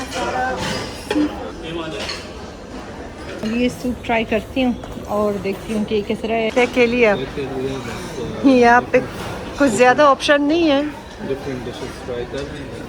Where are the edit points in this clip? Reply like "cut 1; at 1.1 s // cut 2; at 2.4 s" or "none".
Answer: none